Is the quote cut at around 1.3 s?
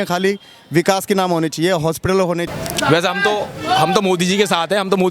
no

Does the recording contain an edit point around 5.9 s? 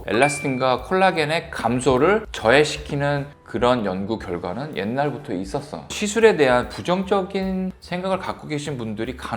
yes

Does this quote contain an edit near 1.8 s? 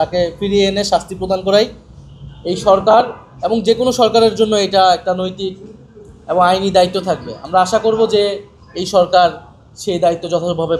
no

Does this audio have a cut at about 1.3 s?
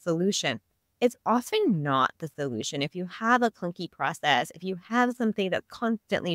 no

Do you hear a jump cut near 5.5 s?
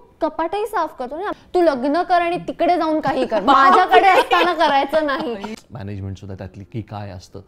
yes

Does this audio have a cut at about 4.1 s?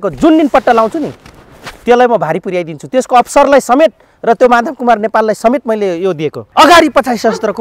no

